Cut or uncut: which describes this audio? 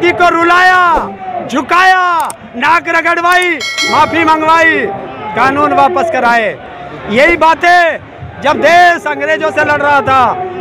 uncut